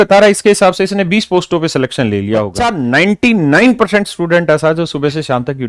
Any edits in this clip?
yes; 1 cut; at 2.6 s

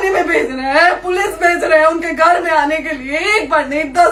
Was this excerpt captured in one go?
yes; 0 cuts

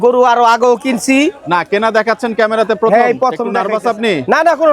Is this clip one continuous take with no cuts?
no; 1 cut; at 3.5 s

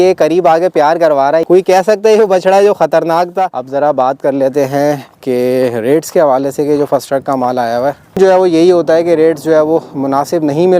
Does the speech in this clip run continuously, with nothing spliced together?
no; 3 cuts; at 1.4 s, 3.6 s, 8.2 s

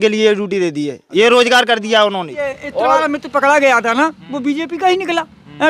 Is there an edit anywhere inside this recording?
yes; 1 cut; at 2.3 s

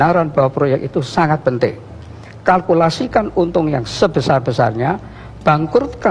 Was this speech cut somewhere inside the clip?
no; 0 cuts

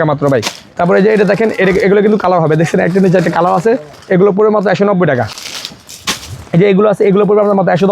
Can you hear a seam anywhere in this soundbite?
no; 0 cuts

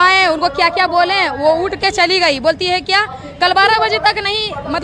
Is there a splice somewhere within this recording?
no; 0 cuts

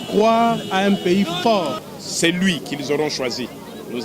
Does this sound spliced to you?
yes; 1 cut; at 1.8 s

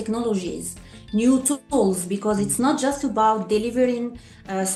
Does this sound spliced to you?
no; 0 cuts

